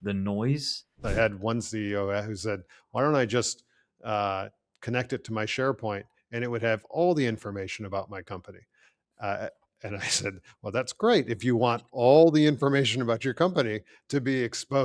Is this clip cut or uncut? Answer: cut